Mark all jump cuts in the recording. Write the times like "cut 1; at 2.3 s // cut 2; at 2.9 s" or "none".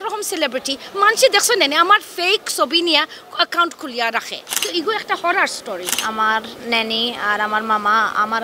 cut 1; at 4.6 s // cut 2; at 5.9 s

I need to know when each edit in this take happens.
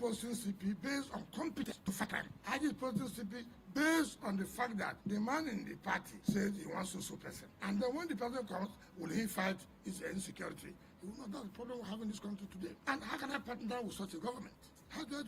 cut 1; at 2.0 s

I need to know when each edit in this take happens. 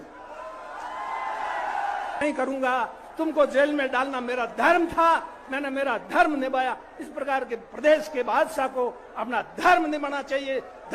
cut 1; at 2.2 s

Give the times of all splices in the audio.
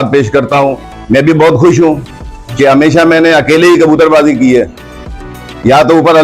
cut 1; at 0.9 s

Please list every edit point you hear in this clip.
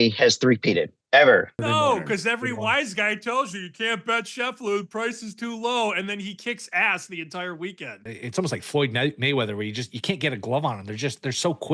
cut 1; at 1.6 s // cut 2; at 7.9 s

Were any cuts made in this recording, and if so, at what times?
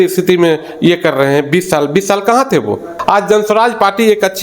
cut 1; at 2.9 s

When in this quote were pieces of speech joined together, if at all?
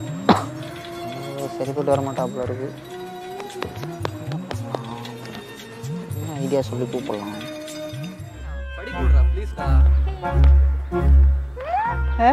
cut 1; at 8.7 s

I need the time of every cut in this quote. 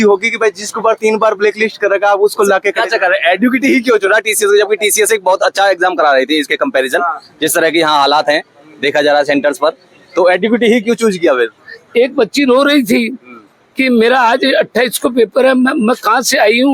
cut 1; at 11.7 s

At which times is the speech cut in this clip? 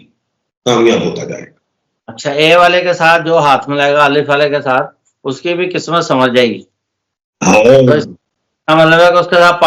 none

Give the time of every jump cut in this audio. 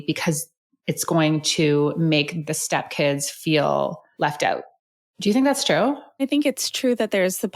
cut 1; at 2.4 s // cut 2; at 6.2 s

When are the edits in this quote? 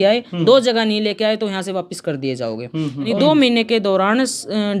cut 1; at 3.1 s

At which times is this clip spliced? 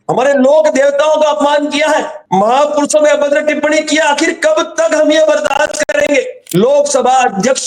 cut 1; at 6.4 s

